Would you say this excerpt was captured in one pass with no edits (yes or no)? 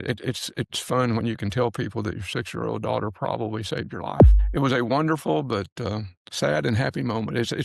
no